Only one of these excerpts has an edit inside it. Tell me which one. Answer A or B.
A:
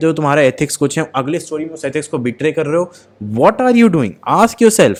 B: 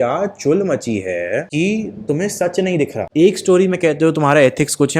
B